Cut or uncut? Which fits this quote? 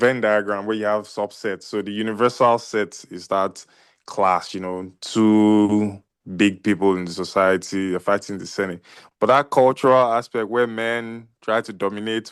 uncut